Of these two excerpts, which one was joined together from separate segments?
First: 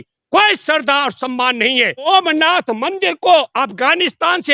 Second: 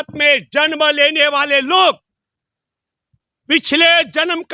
first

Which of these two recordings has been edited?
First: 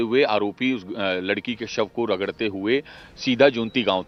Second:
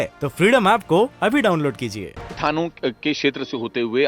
second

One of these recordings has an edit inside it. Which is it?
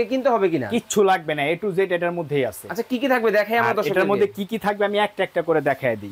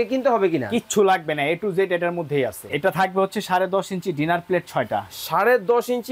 second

